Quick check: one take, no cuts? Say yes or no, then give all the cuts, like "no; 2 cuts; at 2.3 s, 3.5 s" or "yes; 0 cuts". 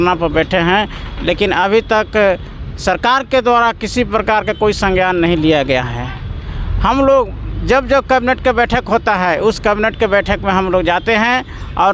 yes; 0 cuts